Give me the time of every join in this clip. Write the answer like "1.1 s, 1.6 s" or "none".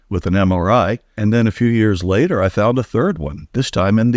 1.1 s